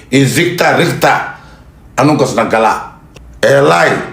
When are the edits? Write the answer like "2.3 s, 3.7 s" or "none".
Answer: 2.9 s